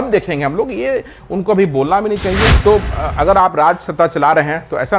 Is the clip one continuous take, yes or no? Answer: no